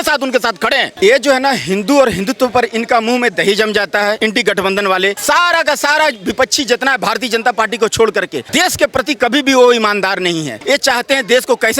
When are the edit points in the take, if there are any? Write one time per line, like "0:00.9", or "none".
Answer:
0:00.9
0:04.2
0:05.2
0:08.4
0:10.5